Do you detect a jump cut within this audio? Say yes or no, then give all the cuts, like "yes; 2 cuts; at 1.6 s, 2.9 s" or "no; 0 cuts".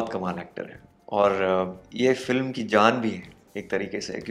no; 0 cuts